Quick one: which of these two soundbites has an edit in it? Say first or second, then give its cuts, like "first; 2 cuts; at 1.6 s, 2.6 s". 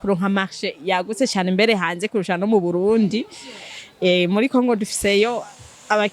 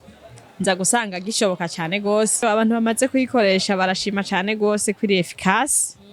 second; 1 cut; at 2.4 s